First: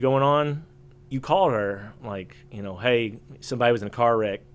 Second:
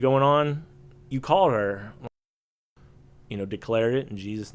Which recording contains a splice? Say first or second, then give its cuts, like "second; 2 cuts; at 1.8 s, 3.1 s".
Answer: second; 1 cut; at 2.5 s